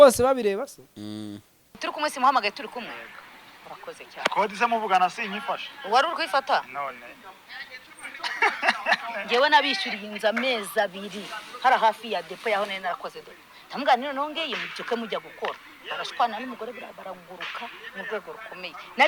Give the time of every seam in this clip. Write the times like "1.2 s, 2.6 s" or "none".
1.9 s